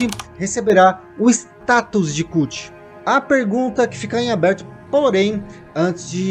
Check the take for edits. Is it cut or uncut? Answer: uncut